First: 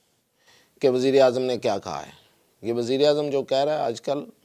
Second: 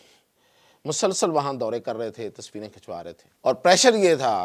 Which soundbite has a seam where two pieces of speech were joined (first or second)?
second